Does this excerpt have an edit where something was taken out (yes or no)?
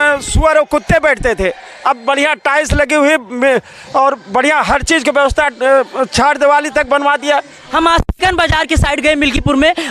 no